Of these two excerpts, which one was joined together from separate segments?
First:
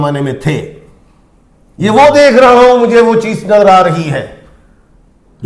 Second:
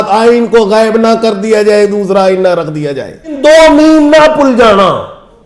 second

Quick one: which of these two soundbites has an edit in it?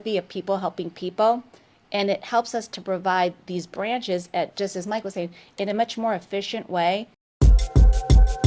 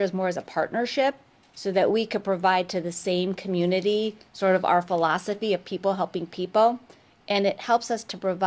first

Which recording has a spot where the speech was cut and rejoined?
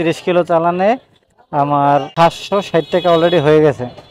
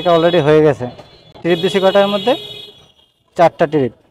first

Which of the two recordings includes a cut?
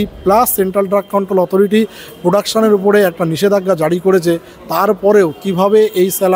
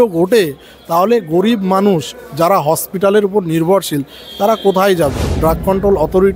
second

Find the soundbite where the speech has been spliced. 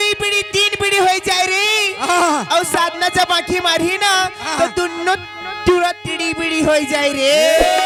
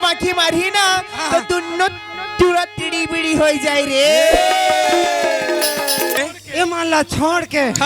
second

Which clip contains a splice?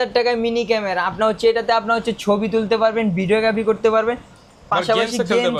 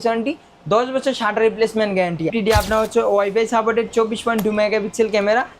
second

